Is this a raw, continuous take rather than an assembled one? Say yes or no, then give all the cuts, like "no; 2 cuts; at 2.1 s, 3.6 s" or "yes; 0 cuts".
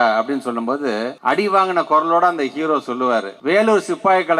no; 2 cuts; at 1.1 s, 3.3 s